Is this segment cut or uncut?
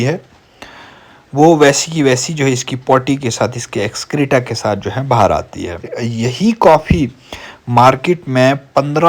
cut